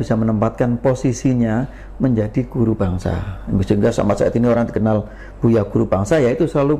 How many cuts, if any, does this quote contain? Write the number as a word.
zero